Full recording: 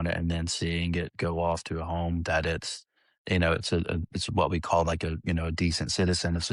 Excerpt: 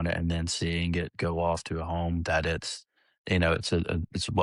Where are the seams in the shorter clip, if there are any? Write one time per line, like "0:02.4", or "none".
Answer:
none